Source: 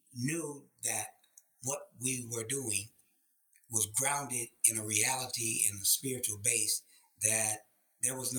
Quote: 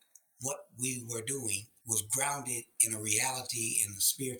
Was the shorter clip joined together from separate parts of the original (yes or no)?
yes